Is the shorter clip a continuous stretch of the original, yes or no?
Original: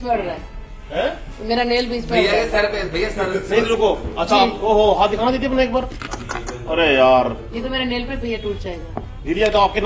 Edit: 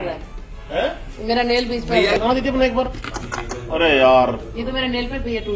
no